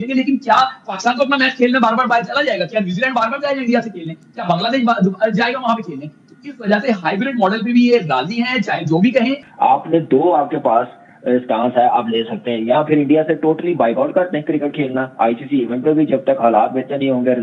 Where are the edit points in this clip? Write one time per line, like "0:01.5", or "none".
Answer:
none